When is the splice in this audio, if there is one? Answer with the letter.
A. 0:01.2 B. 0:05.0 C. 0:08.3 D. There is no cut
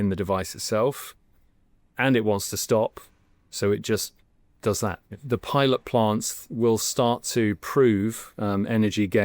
B